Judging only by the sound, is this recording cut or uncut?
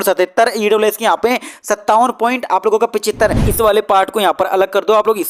cut